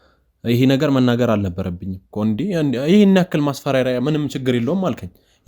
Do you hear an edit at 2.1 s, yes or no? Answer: yes